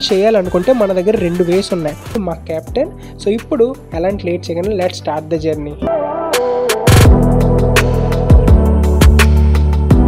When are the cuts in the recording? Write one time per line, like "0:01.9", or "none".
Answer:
0:02.2
0:05.9